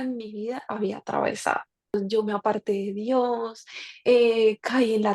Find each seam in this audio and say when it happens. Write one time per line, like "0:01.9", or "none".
0:01.9